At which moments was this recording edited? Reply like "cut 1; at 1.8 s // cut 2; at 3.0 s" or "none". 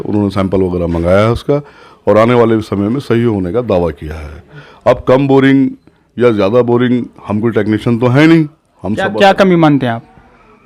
none

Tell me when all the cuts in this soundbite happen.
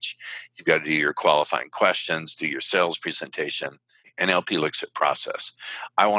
cut 1; at 4.1 s

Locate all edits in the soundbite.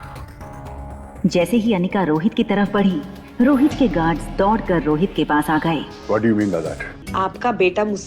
cut 1; at 7.1 s

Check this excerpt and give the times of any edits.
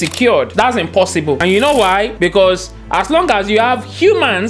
cut 1; at 1.4 s

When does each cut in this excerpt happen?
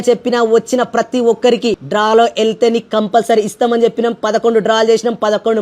cut 1; at 1.8 s

